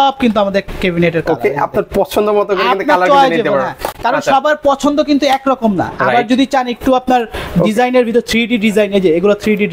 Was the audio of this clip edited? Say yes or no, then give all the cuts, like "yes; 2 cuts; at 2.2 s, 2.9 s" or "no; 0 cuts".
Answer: no; 0 cuts